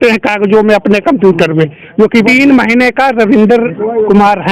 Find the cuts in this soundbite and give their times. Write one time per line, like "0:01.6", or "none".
0:02.2